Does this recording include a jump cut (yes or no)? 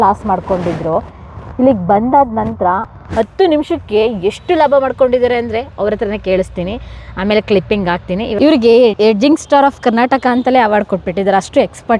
yes